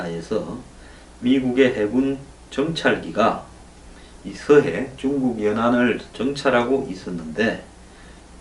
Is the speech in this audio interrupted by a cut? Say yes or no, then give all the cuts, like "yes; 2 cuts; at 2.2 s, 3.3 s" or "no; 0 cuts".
no; 0 cuts